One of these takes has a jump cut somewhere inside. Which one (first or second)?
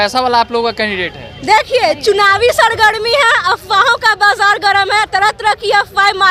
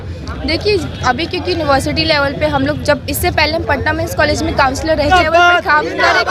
second